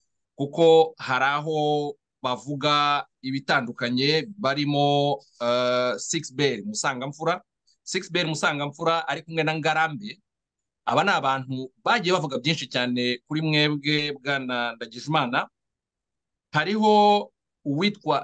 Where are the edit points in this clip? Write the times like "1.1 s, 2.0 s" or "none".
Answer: none